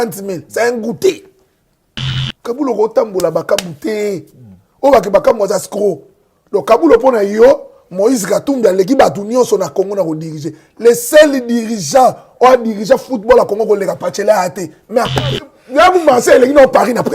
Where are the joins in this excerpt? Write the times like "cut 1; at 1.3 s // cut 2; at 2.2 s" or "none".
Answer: cut 1; at 15.5 s